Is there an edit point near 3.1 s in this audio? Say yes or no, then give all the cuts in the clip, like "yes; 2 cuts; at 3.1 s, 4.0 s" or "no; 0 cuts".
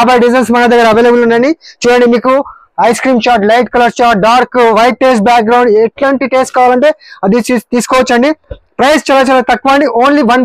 no; 0 cuts